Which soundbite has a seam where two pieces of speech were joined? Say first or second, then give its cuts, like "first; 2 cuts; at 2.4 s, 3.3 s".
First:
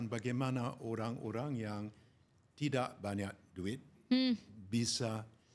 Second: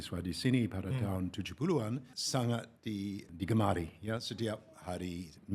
second; 2 cuts; at 2.0 s, 3.3 s